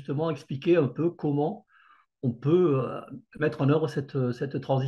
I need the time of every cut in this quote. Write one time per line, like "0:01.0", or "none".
none